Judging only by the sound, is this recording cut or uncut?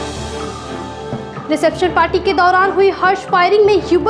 cut